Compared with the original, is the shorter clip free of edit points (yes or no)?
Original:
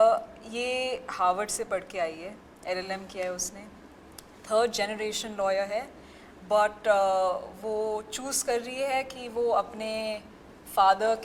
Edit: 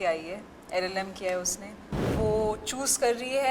no